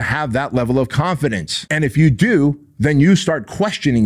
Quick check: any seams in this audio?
yes; 1 cut; at 1.6 s

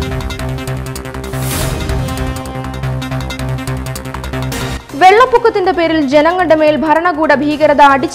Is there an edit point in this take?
no; 0 cuts

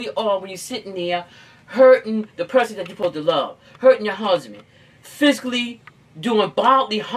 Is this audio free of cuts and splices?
no; 1 cut; at 2.9 s

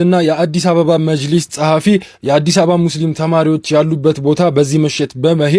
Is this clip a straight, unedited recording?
yes; 0 cuts

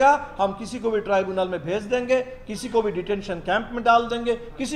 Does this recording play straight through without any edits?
yes; 0 cuts

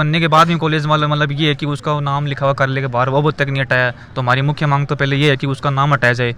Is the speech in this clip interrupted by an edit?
no; 0 cuts

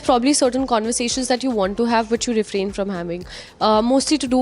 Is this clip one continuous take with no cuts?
yes; 0 cuts

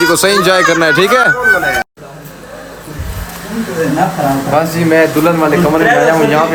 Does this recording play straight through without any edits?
yes; 0 cuts

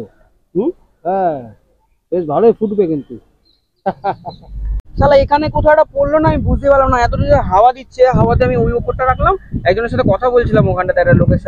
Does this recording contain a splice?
yes; 1 cut; at 4.8 s

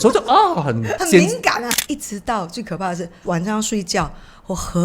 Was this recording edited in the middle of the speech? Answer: yes; 3 cuts; at 1.0 s, 1.7 s, 3.2 s

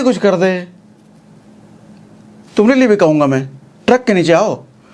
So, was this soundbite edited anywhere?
no; 0 cuts

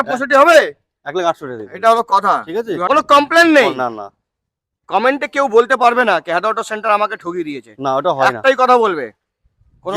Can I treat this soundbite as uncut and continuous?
no; 1 cut; at 2.8 s

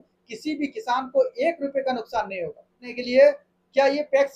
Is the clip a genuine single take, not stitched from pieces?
no; 1 cut; at 2.9 s

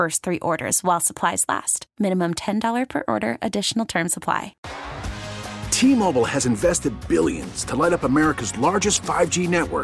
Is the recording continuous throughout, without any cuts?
no; 1 cut; at 4.5 s

